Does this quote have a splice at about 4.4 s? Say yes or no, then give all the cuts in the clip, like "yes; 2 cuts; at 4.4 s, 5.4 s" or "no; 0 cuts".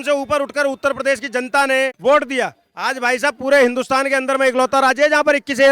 no; 1 cut; at 1.9 s